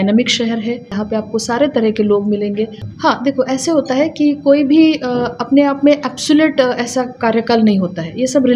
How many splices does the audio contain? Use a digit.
2